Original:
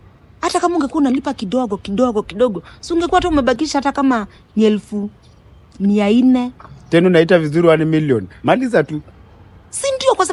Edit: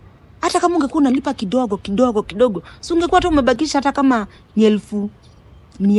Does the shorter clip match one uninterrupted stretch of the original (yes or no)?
yes